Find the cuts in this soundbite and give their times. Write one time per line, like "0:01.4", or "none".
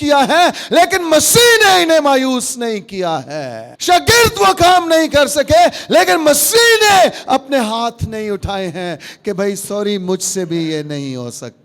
0:03.7